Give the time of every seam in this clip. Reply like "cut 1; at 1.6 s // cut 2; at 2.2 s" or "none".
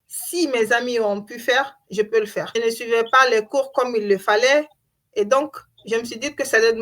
cut 1; at 2.5 s